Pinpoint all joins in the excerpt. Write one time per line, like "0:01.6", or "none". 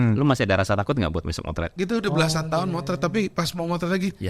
0:01.7